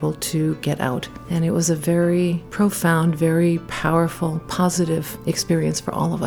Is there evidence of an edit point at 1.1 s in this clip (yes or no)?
yes